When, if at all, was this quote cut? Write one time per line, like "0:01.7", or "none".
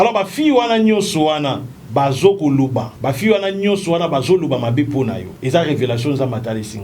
0:01.7
0:02.9
0:05.3